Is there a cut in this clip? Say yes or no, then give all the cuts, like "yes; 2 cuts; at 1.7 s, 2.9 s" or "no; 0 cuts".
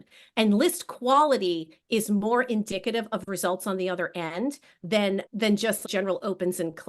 yes; 1 cut; at 5.8 s